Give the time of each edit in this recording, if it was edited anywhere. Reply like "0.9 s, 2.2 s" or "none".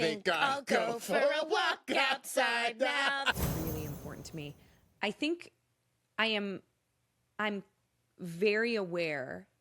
3.3 s